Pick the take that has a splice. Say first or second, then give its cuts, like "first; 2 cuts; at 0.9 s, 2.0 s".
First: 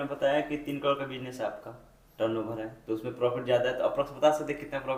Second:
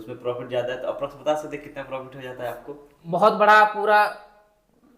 second; 1 cut; at 3.0 s